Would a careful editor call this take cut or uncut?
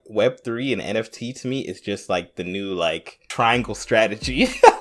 cut